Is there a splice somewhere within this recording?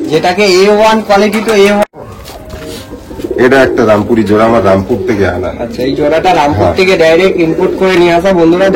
yes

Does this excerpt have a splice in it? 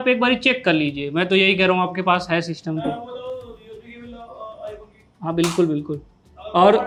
no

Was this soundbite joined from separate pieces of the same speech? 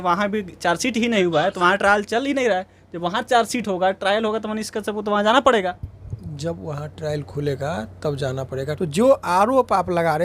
yes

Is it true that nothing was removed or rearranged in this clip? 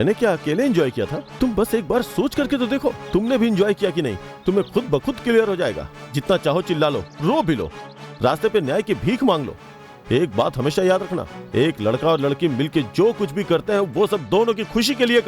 no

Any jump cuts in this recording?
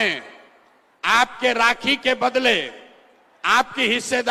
no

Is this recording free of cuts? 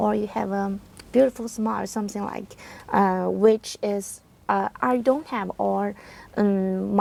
yes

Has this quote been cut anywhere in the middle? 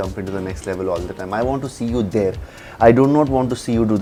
no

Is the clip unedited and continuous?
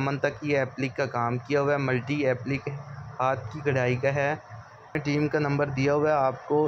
no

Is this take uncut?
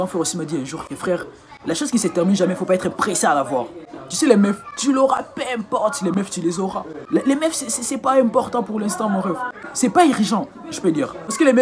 no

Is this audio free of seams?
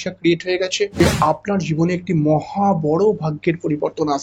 no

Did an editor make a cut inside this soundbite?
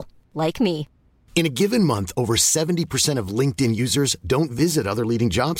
no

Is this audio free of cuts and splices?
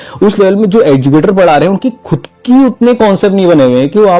yes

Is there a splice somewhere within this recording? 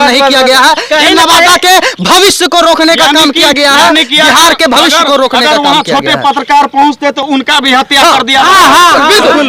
no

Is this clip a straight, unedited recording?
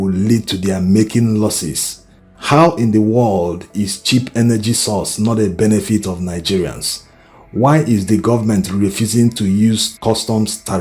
yes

